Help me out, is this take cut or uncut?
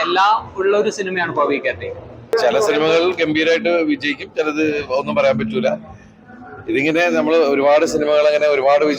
cut